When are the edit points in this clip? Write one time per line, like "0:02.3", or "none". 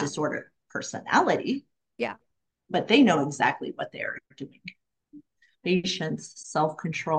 0:05.5